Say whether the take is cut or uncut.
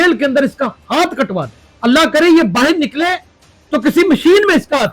cut